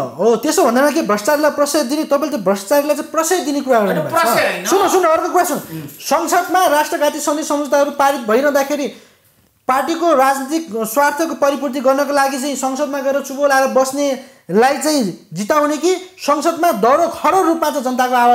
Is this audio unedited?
yes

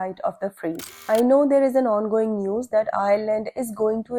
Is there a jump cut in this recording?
yes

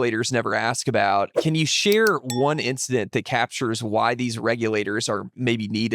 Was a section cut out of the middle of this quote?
yes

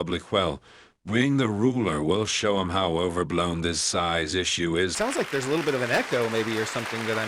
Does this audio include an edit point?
yes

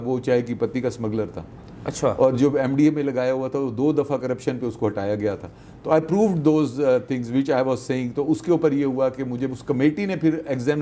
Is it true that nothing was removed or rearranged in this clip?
yes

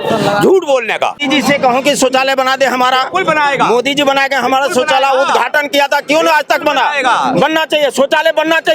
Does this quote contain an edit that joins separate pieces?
yes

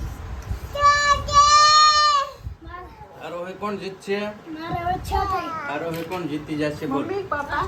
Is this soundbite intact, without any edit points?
yes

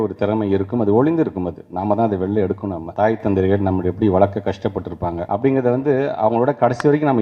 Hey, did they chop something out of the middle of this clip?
yes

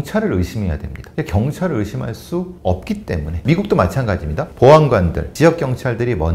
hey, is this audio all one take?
yes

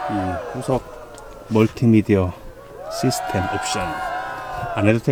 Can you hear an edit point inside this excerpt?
no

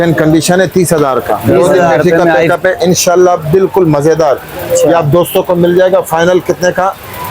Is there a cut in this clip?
yes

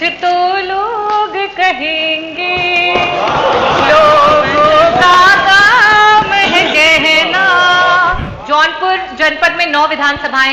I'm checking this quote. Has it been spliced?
yes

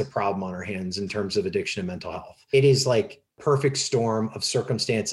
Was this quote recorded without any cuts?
no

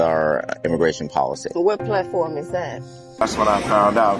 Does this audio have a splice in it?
yes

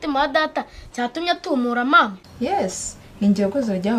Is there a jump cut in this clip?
no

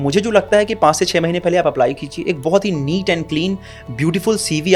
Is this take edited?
no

